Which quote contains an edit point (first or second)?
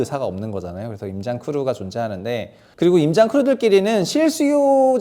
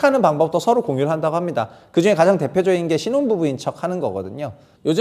first